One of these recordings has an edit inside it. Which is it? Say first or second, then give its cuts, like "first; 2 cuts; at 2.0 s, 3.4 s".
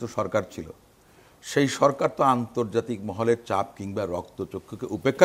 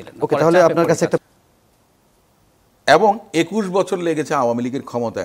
second; 1 cut; at 1.2 s